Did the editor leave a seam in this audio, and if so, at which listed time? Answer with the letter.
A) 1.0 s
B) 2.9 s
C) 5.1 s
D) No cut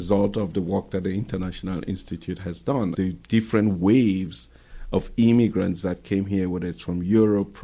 B